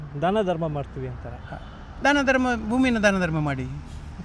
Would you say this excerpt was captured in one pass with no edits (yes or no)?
yes